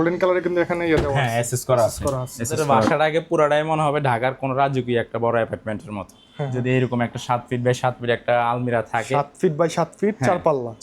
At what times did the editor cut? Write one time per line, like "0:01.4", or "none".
0:02.7